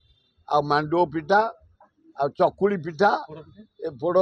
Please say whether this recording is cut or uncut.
uncut